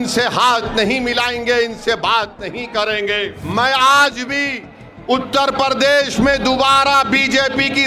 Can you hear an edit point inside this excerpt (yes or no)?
yes